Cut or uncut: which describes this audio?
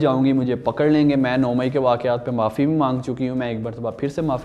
uncut